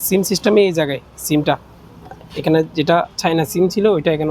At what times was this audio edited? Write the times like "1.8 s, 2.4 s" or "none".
none

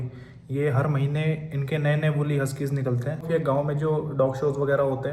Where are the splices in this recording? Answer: 3.3 s

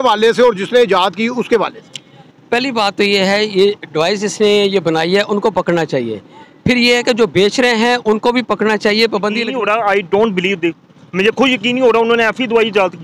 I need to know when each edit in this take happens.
9.4 s

